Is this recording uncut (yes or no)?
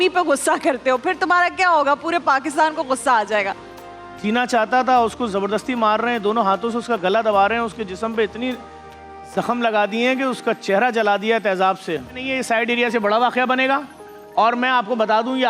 no